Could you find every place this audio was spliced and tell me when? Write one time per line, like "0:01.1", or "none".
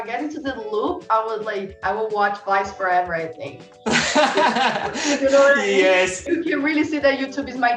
0:06.2